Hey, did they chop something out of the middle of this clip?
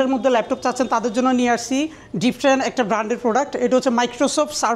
no; 0 cuts

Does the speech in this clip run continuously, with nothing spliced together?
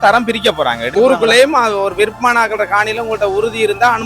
no; 1 cut; at 0.9 s

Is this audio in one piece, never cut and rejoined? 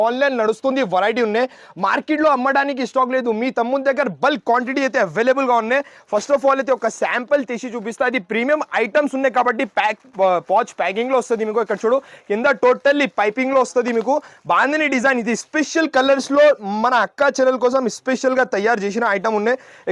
yes; 0 cuts

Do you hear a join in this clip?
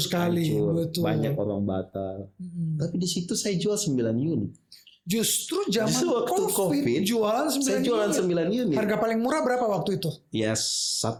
no; 0 cuts

